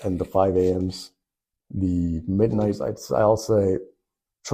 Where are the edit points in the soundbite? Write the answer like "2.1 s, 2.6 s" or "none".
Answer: 2.9 s